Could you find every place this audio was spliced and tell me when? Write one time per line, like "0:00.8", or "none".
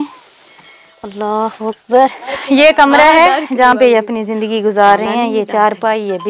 0:02.3

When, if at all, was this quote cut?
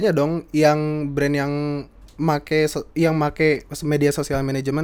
none

